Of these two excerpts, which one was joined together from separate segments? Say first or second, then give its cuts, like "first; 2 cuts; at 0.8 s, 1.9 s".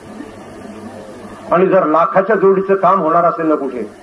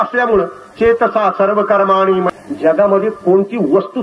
second; 1 cut; at 2.4 s